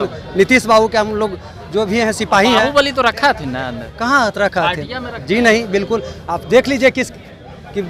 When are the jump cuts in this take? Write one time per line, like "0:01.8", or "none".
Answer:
none